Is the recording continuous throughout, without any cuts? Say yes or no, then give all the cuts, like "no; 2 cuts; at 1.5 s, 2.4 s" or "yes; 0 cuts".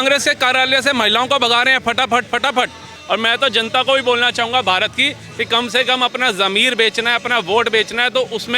no; 1 cut; at 2.9 s